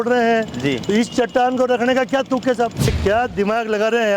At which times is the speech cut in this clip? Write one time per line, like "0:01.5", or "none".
0:03.0